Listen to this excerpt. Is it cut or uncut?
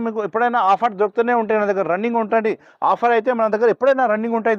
uncut